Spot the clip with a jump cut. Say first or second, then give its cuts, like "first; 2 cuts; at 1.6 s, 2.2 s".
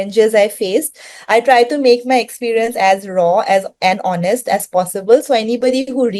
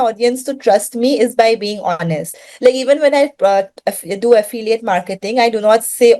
second; 1 cut; at 2.5 s